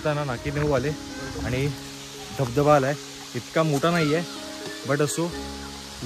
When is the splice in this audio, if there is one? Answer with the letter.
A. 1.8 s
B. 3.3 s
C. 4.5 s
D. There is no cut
D